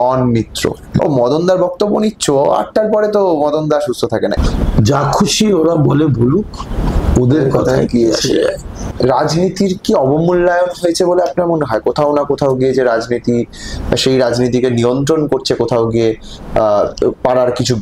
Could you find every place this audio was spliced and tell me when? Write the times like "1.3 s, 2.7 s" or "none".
1.0 s, 4.4 s, 8.8 s